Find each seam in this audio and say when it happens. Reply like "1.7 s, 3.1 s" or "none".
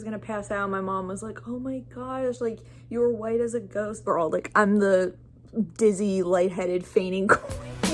4.0 s